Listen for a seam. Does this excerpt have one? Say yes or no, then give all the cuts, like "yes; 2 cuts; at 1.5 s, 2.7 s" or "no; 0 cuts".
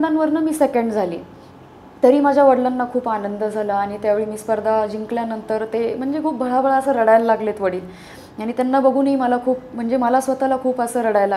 no; 0 cuts